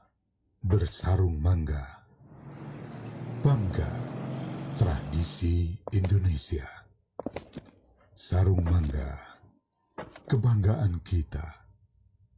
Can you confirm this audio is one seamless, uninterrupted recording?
no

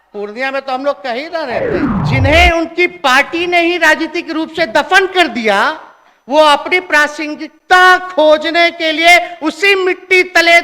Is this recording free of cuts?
no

